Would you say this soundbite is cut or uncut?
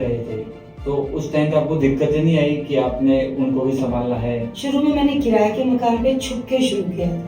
cut